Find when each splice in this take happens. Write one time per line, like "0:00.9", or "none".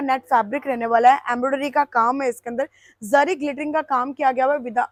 none